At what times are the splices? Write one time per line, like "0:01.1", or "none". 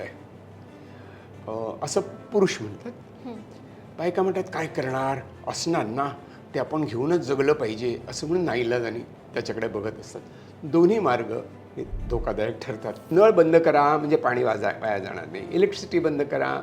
0:13.0